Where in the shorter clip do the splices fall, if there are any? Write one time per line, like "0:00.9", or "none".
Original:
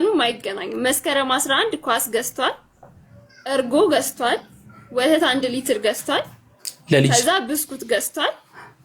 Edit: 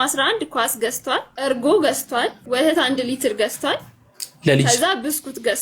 0:01.3
0:02.4

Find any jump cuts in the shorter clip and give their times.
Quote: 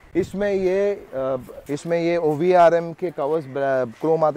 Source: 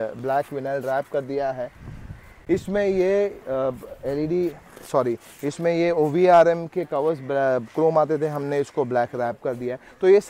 0:01.6

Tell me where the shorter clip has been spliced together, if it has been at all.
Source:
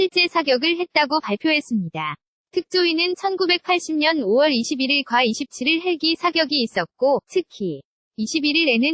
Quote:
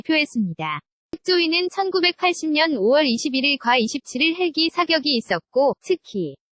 0:01.2

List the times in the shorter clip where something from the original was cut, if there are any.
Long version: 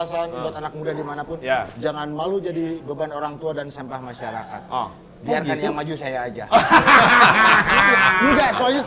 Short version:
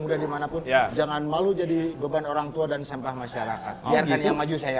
0:00.9
0:03.7

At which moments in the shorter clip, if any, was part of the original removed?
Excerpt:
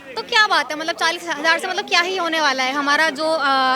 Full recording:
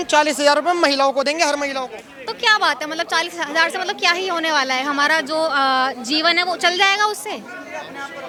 none

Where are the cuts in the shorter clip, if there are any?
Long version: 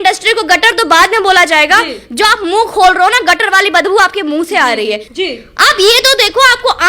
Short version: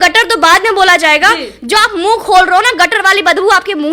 none

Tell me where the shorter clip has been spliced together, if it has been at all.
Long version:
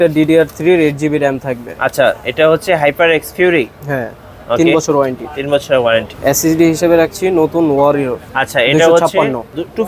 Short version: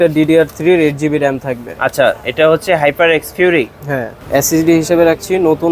0:04.2

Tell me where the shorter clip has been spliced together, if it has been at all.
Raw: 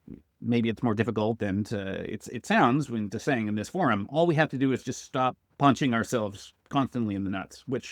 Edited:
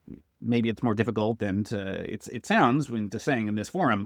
none

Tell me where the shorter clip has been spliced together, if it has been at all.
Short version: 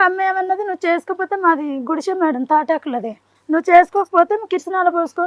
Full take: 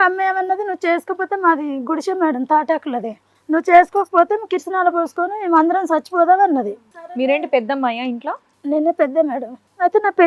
none

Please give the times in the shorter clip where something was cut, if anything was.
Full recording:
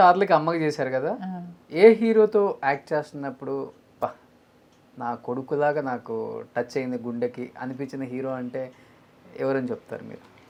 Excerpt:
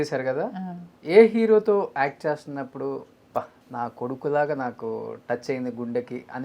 0:03.6

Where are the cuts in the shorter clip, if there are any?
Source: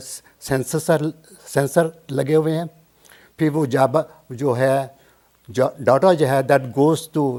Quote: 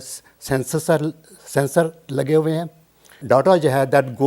0:03.2

